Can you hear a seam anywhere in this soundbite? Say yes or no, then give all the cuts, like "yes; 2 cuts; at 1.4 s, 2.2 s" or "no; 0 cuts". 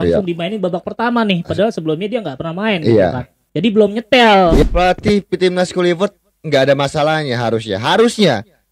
yes; 1 cut; at 4.6 s